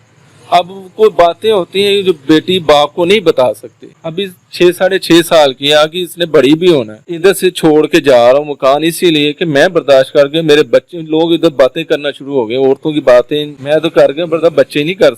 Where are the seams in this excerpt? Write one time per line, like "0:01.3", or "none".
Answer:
0:04.2
0:07.1
0:13.6